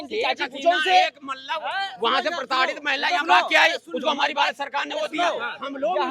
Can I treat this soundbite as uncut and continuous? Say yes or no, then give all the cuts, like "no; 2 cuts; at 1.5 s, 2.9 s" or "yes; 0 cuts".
yes; 0 cuts